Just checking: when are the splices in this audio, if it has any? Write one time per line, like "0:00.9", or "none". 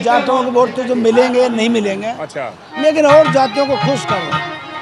none